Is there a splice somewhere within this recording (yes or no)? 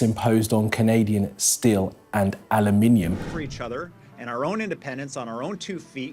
yes